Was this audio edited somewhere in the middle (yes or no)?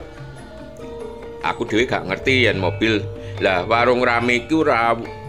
no